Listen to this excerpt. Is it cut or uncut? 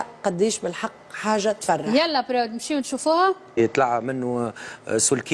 cut